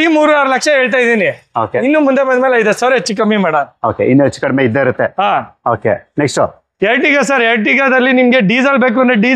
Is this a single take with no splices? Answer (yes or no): yes